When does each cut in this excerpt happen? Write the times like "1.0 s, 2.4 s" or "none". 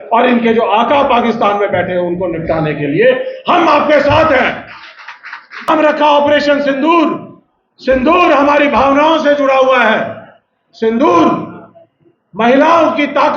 5.7 s